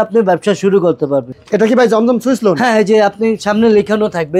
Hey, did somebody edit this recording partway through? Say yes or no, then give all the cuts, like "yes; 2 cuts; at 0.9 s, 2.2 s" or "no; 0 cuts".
yes; 1 cut; at 1.4 s